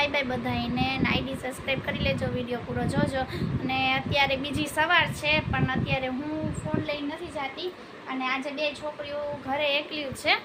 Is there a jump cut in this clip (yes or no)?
no